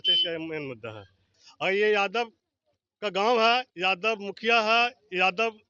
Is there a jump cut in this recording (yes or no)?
yes